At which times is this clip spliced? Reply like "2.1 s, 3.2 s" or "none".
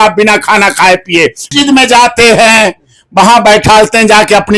1.5 s